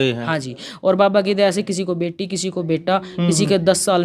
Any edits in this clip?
no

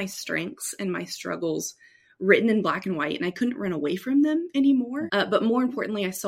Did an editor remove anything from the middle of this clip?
yes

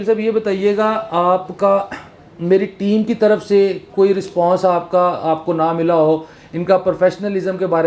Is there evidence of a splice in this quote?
no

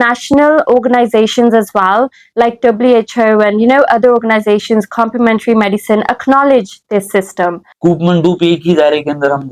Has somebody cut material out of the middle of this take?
yes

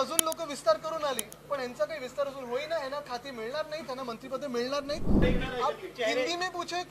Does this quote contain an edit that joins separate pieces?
yes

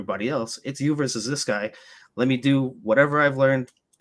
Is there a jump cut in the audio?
no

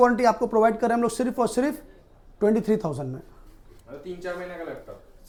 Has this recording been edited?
no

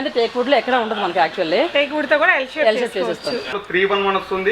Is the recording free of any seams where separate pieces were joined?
no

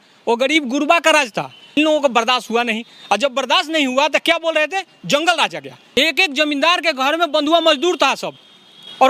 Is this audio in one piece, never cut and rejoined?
no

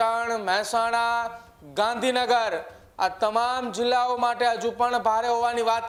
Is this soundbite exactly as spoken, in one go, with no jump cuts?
yes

